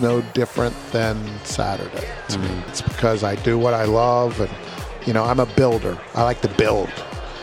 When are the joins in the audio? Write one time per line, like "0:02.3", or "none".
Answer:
0:02.8